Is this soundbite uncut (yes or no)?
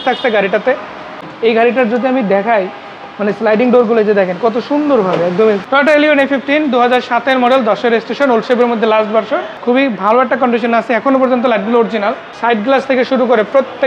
no